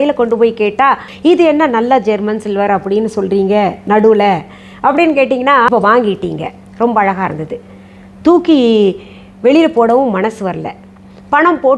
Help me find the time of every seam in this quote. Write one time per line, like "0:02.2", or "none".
0:01.1
0:05.7

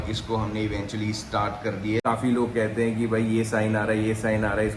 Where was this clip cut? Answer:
0:02.0

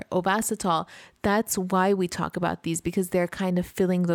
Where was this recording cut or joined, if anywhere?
none

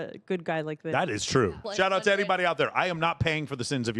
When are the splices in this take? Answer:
0:01.6

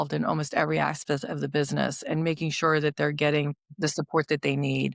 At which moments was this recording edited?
0:03.6

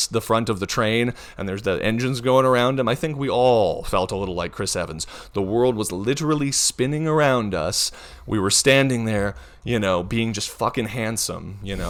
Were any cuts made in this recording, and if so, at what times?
none

